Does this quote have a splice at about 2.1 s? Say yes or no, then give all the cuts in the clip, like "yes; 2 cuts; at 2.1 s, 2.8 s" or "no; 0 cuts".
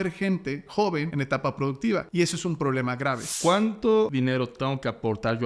yes; 4 cuts; at 1.1 s, 2.1 s, 3.3 s, 4.1 s